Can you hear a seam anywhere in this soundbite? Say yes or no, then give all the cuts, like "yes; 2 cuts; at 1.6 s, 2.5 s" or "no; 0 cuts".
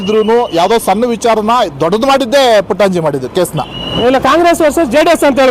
yes; 1 cut; at 3.8 s